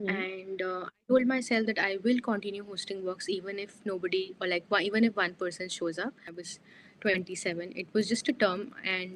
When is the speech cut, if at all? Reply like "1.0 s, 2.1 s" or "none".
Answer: 6.3 s